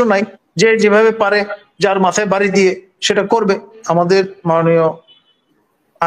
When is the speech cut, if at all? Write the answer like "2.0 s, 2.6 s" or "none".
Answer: 3.8 s